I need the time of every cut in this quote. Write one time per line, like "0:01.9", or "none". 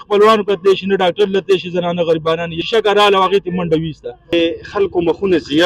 0:02.6
0:04.3